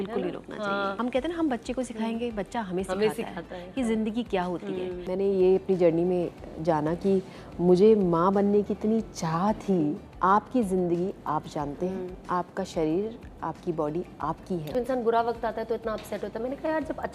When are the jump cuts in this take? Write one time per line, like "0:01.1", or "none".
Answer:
0:00.9
0:05.0
0:10.1
0:12.1
0:14.7